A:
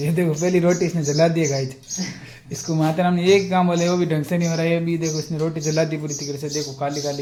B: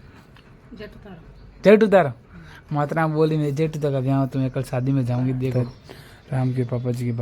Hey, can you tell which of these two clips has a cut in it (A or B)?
B